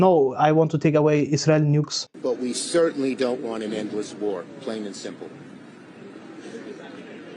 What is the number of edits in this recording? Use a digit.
1